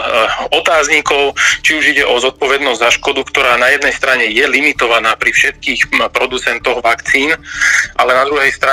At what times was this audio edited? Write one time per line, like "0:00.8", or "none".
none